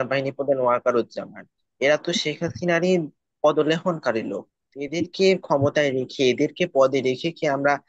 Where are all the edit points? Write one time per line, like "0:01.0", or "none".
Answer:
none